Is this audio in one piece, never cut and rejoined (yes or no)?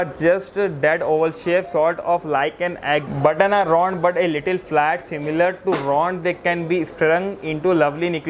no